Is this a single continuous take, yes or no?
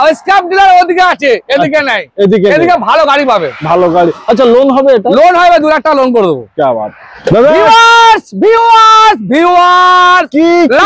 yes